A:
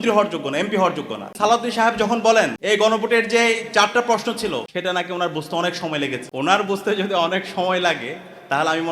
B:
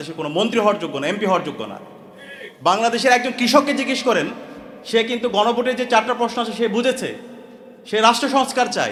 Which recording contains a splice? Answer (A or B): A